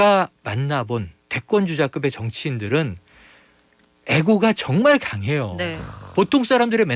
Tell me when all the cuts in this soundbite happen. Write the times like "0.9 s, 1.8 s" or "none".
none